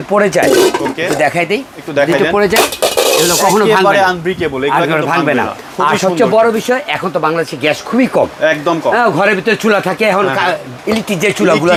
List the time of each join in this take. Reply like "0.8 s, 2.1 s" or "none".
none